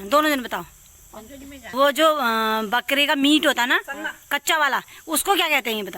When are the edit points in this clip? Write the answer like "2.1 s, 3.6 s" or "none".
1.7 s